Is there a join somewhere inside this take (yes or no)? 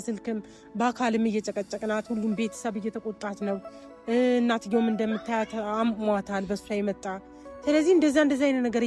no